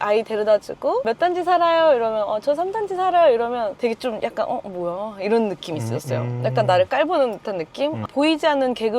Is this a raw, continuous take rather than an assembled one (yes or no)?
no